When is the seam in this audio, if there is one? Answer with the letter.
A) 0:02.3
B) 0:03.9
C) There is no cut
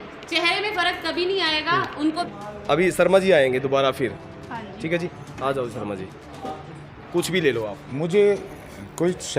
A